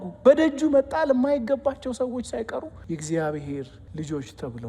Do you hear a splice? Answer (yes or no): yes